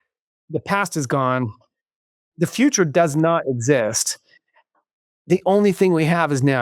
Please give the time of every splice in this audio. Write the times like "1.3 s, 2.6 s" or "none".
none